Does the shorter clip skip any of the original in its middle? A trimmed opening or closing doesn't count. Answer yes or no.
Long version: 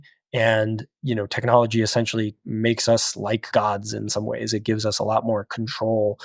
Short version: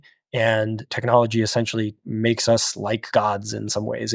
yes